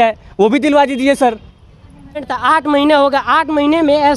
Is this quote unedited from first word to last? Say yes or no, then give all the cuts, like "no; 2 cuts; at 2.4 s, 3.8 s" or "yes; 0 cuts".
no; 1 cut; at 2.2 s